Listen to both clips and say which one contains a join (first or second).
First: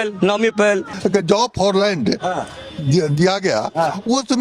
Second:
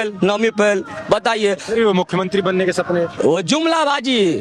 first